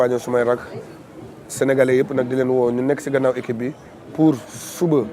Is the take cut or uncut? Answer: cut